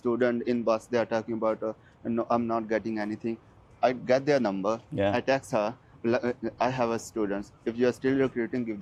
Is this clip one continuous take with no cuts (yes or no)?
yes